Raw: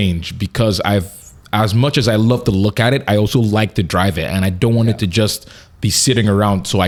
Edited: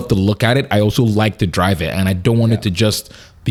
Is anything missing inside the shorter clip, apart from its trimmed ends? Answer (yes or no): no